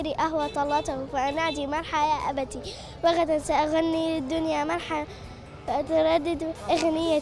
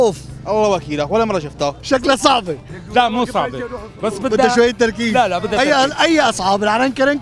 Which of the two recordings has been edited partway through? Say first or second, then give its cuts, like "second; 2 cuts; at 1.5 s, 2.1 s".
second; 1 cut; at 1.8 s